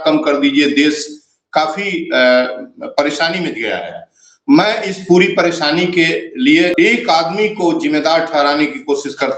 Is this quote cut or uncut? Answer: cut